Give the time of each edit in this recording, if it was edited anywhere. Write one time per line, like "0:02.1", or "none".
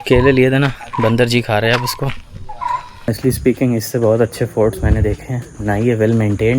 0:02.9